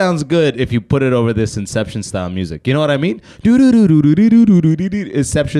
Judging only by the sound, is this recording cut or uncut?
uncut